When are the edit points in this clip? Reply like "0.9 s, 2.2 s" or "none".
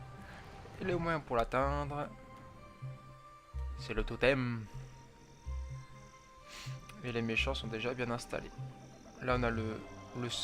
4.1 s